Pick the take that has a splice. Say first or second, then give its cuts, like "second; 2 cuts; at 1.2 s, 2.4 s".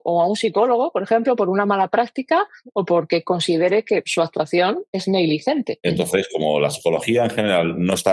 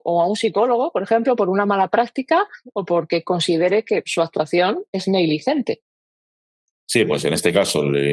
first; 1 cut; at 5.7 s